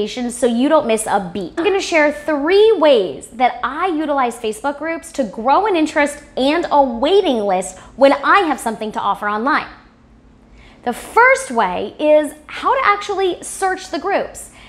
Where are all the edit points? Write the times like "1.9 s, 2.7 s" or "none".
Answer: 1.6 s